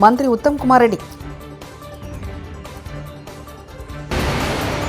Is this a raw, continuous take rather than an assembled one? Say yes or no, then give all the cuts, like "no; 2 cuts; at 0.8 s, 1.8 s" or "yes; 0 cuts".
no; 1 cut; at 4.0 s